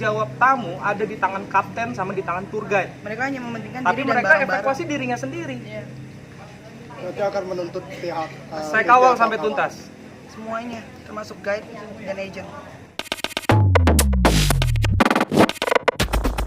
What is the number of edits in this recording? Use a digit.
1